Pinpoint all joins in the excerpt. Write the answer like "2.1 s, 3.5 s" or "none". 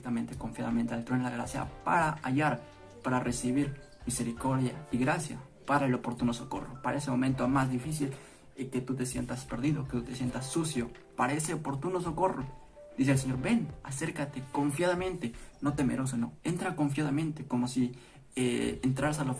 none